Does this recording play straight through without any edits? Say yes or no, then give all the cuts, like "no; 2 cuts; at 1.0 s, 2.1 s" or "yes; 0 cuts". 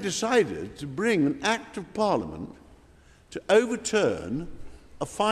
yes; 0 cuts